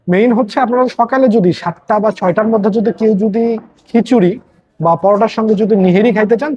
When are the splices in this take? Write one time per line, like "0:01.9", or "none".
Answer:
none